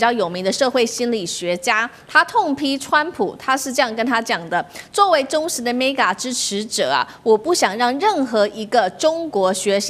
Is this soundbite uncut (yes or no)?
yes